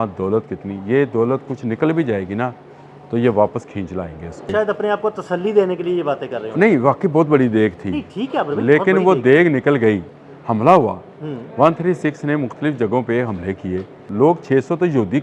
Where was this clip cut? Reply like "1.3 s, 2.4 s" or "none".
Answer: 4.5 s, 10.1 s, 14.1 s